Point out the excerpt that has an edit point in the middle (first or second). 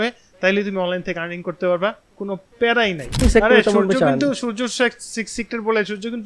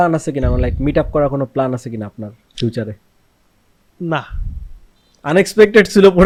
first